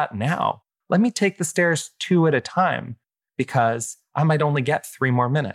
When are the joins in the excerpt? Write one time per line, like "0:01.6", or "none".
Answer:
none